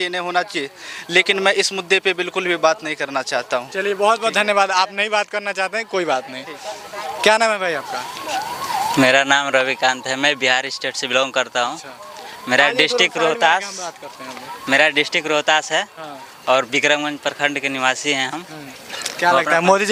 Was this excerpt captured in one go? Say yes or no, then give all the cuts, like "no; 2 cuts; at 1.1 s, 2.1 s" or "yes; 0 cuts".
yes; 0 cuts